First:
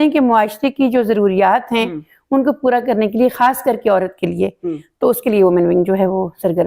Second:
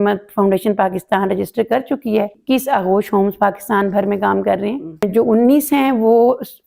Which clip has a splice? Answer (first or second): second